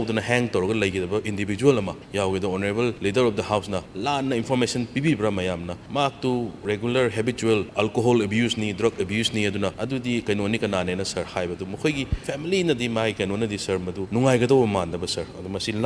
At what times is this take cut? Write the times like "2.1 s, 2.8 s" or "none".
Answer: 2.0 s, 3.0 s, 3.9 s, 5.8 s, 6.6 s, 7.7 s, 9.8 s, 12.2 s, 14.0 s